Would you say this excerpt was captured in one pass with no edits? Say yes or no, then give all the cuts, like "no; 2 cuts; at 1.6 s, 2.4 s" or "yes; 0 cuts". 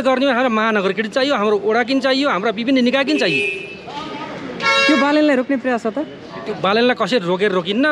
yes; 0 cuts